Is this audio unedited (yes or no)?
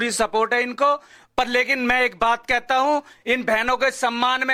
yes